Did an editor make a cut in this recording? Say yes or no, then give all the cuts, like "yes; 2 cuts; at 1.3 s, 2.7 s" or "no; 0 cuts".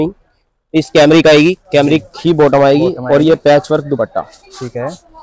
no; 0 cuts